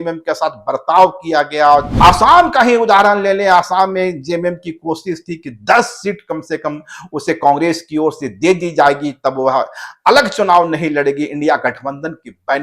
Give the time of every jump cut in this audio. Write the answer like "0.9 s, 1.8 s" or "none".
1.9 s